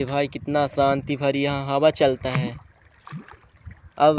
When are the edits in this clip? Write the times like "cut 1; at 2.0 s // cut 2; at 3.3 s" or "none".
none